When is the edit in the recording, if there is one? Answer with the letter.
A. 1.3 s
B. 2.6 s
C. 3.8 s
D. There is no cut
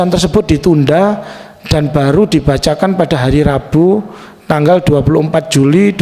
D